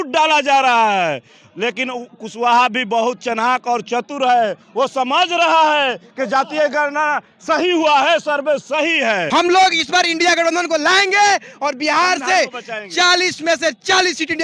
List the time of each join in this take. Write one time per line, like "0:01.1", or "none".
0:09.2